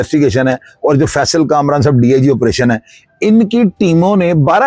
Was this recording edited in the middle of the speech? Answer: no; 0 cuts

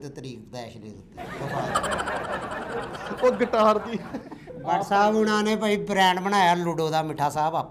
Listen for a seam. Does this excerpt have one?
yes; 1 cut; at 4.6 s

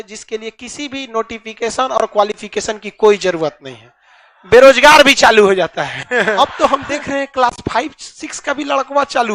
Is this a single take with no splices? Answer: no; 1 cut; at 6.4 s

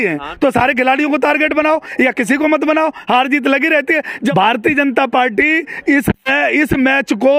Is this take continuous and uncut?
no; 1 cut; at 4.1 s

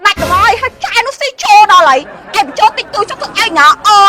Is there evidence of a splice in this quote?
no; 0 cuts

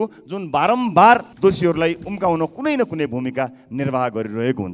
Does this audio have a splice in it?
yes; 1 cut; at 1.3 s

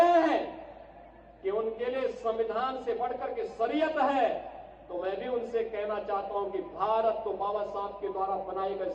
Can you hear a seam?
no; 0 cuts

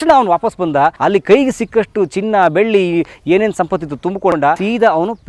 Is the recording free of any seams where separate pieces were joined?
no; 2 cuts; at 1.0 s, 4.3 s

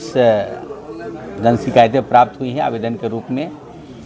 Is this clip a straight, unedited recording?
yes; 0 cuts

